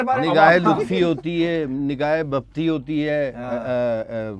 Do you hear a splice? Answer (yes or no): no